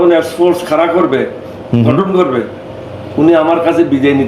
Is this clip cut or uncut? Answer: uncut